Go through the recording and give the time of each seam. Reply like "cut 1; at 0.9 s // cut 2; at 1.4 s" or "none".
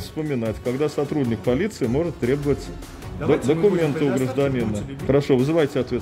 cut 1; at 4.9 s